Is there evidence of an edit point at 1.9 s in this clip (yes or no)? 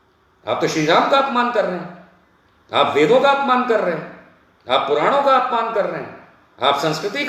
no